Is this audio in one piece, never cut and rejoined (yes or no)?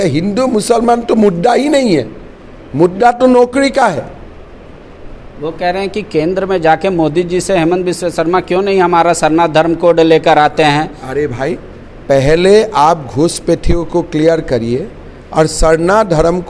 yes